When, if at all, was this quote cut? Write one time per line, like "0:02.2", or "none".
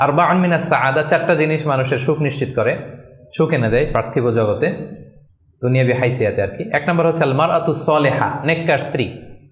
none